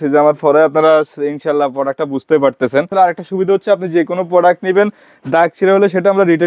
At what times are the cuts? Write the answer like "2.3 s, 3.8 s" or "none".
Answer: 2.9 s